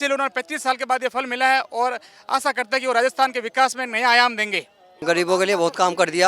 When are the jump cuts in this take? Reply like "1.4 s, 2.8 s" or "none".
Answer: 5.0 s